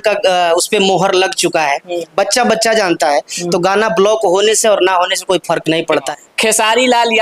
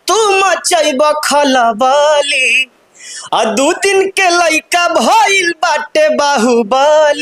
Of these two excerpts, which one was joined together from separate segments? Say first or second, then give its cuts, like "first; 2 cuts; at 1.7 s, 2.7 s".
first; 1 cut; at 6.1 s